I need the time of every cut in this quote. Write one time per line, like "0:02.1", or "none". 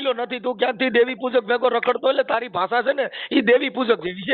none